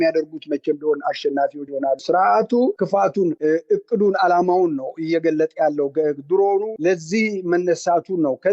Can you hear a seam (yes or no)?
yes